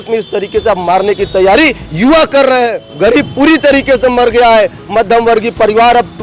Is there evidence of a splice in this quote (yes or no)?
yes